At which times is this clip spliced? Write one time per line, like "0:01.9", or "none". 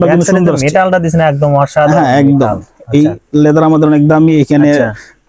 none